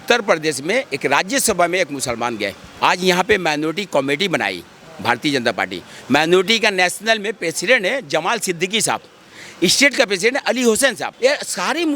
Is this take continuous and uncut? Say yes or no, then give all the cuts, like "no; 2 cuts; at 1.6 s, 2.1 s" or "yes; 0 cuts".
no; 2 cuts; at 2.6 s, 11.1 s